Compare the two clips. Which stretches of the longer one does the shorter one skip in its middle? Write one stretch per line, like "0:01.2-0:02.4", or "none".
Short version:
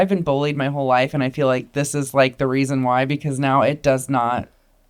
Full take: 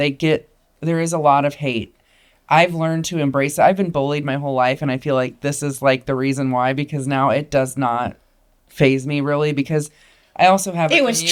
none